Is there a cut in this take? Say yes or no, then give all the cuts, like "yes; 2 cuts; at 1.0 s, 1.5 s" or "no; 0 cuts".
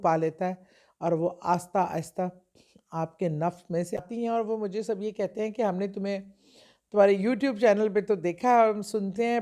yes; 1 cut; at 4.0 s